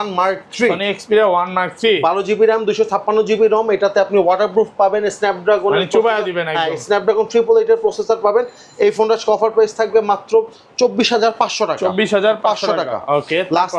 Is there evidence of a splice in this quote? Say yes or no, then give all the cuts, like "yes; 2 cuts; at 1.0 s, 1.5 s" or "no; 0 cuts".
no; 0 cuts